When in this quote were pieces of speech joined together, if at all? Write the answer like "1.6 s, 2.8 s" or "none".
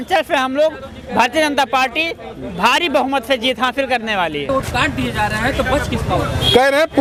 none